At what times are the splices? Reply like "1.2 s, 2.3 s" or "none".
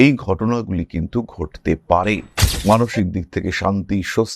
2.4 s